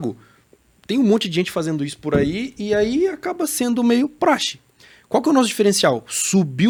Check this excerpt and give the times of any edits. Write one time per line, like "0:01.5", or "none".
none